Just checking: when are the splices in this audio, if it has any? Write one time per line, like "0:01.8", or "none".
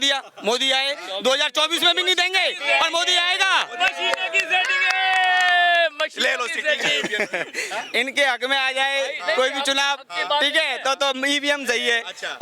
none